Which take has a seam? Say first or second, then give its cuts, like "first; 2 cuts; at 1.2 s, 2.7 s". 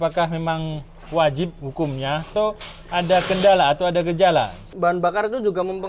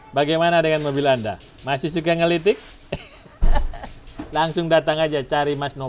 first; 2 cuts; at 2.3 s, 4.7 s